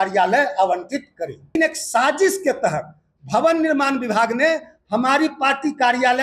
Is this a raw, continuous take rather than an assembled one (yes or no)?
no